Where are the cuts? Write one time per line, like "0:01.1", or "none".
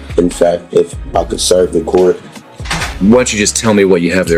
none